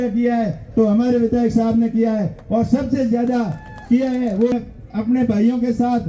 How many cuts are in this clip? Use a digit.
1